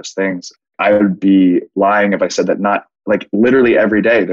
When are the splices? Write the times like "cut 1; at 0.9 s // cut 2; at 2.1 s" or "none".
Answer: cut 1; at 0.9 s